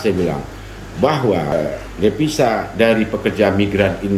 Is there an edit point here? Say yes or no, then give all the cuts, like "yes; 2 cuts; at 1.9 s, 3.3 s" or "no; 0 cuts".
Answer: yes; 1 cut; at 1.5 s